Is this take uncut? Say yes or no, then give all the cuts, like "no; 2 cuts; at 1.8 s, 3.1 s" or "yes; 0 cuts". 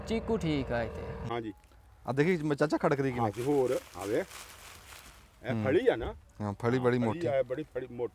no; 1 cut; at 1.2 s